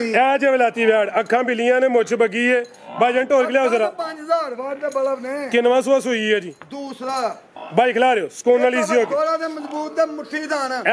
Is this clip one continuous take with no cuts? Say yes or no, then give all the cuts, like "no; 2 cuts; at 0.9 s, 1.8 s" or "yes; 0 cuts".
yes; 0 cuts